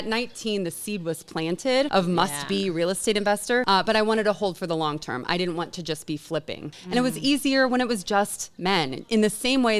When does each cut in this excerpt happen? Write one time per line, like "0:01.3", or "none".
0:01.9
0:03.6
0:06.8